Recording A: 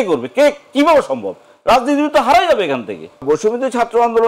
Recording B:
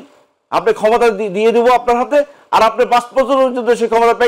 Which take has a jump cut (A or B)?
A